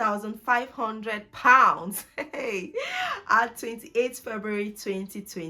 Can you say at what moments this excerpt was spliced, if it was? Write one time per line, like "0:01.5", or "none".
none

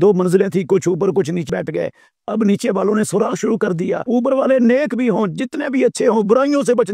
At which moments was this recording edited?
0:01.5
0:04.0

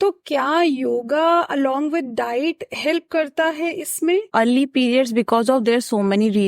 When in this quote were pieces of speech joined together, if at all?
0:04.3

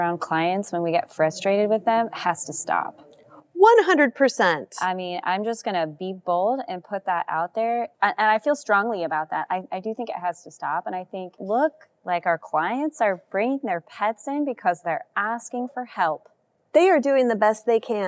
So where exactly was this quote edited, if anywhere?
0:07.9
0:11.4

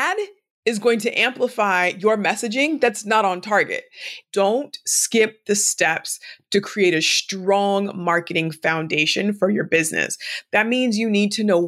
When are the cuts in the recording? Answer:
0:04.2

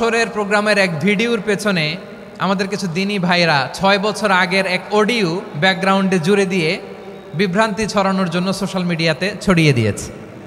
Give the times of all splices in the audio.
none

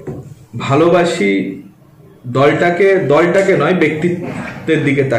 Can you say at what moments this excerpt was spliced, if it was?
none

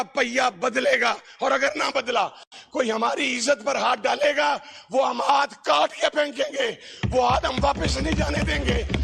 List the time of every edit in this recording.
none

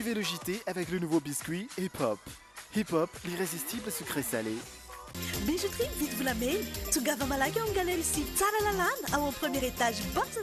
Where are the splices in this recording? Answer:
none

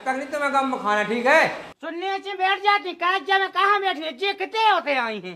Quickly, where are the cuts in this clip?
0:01.8

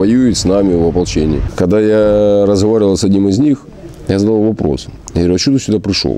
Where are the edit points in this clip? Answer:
0:01.5

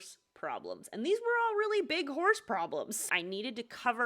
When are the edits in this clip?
0:03.0

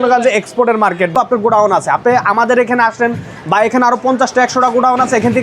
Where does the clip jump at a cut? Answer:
0:00.9

